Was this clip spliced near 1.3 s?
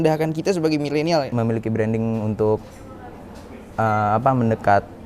yes; 1 cut; at 1.3 s

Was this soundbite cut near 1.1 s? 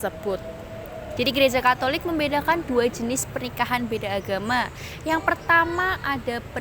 yes; 1 cut; at 1.1 s

